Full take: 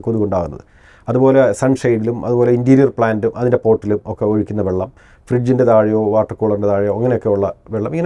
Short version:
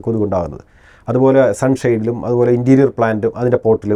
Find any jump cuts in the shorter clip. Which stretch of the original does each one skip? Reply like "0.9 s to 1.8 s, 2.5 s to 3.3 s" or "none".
none